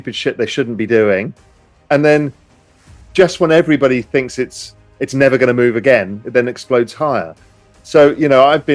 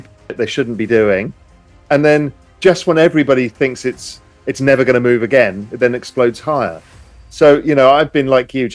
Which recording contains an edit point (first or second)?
second